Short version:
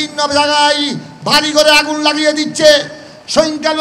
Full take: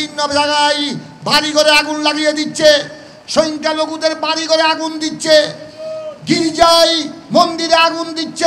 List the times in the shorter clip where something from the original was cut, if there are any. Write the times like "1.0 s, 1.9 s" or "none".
none